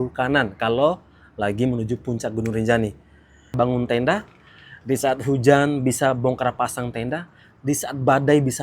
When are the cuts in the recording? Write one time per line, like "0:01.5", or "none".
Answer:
0:03.6